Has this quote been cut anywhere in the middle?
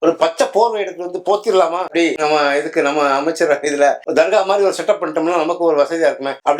no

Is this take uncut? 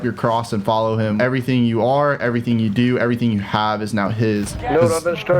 no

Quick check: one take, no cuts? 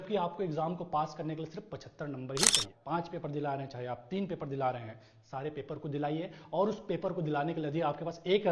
no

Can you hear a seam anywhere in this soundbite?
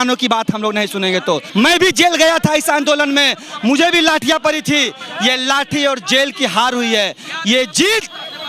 yes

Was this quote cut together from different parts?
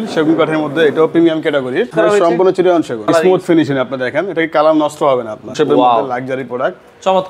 yes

